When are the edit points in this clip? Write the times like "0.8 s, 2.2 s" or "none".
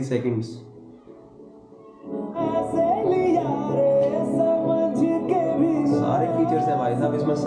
none